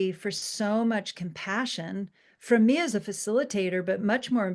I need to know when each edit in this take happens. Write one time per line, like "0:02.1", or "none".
none